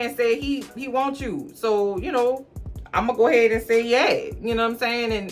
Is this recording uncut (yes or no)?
yes